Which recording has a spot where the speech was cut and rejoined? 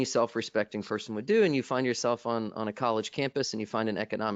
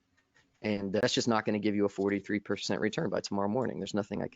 second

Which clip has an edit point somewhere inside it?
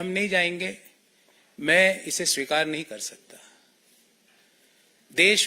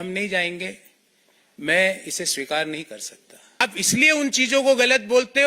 second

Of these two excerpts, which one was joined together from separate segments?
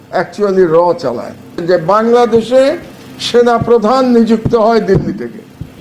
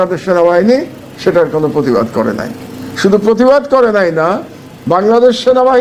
first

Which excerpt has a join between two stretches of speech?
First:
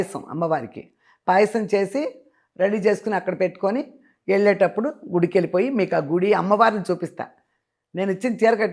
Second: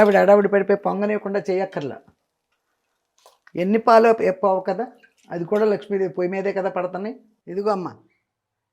second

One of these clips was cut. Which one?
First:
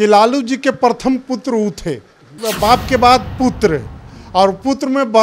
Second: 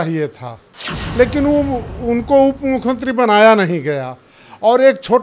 first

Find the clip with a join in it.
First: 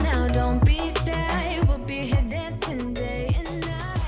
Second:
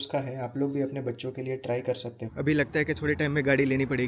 second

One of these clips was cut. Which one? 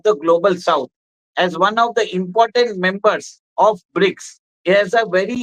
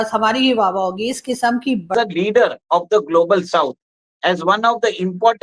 second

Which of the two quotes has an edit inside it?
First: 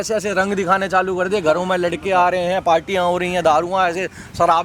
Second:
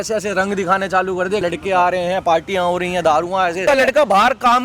second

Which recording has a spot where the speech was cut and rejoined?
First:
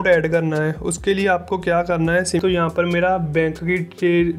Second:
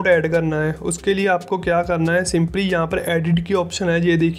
first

